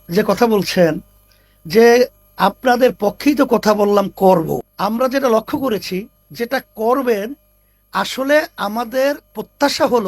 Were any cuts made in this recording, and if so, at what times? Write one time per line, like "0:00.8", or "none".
0:04.7